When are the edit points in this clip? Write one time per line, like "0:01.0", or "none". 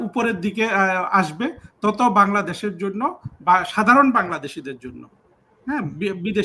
none